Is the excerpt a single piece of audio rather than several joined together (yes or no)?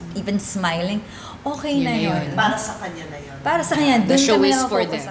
yes